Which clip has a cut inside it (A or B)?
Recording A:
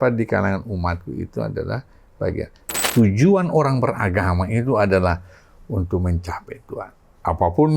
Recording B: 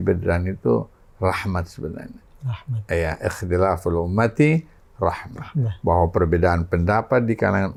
A